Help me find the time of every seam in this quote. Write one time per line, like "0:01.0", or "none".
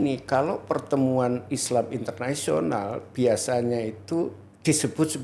none